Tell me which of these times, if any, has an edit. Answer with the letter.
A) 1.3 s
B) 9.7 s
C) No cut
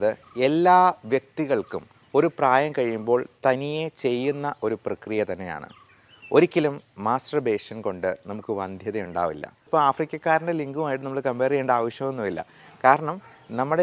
B